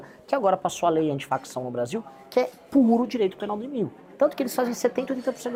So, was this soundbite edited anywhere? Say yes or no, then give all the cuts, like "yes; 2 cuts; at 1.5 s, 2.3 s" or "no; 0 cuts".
no; 0 cuts